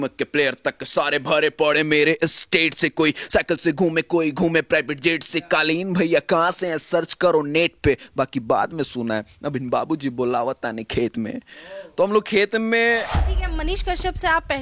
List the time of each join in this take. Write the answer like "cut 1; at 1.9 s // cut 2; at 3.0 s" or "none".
cut 1; at 13.2 s